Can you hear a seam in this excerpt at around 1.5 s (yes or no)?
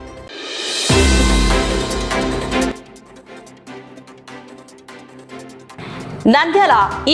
no